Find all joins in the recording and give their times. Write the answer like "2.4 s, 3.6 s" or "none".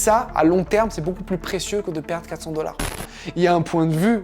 2.9 s